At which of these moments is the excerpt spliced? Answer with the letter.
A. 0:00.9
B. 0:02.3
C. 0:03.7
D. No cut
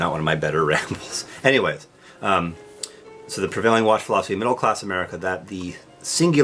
D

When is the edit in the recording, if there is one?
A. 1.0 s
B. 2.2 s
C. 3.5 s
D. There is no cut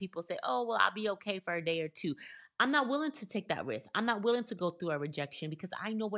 D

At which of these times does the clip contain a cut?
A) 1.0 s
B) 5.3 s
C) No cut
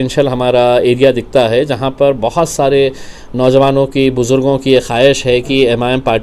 C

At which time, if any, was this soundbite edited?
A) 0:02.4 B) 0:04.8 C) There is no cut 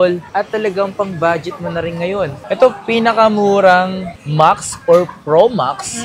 A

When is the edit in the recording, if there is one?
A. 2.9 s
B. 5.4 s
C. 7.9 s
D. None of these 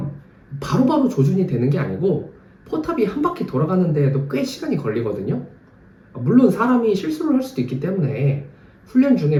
D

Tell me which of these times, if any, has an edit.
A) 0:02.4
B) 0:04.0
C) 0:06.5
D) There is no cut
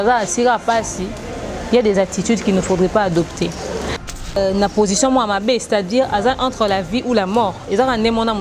B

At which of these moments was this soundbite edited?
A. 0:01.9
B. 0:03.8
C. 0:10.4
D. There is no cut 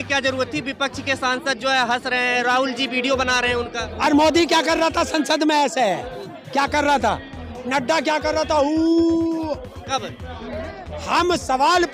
C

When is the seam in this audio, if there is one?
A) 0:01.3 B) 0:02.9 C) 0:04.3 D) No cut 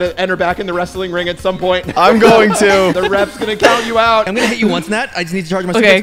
C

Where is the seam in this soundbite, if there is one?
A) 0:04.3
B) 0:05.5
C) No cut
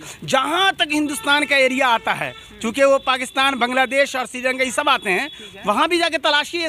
C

